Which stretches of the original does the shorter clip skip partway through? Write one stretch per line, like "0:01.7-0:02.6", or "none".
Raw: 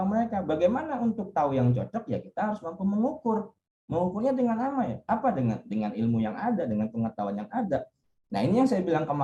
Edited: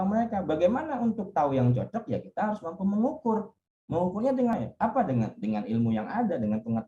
0:04.6-0:04.8